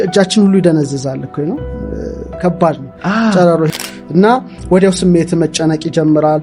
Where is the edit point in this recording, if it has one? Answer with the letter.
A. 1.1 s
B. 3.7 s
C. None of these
B